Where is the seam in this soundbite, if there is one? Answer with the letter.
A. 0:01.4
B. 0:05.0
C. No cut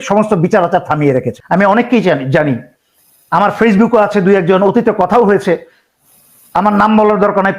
A